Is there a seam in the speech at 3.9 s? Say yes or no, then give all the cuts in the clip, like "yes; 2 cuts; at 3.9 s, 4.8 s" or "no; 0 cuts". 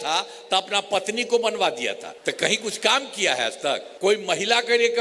yes; 2 cuts; at 2.1 s, 3.9 s